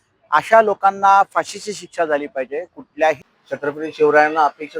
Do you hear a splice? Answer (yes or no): yes